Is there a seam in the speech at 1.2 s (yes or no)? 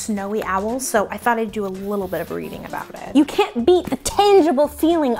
no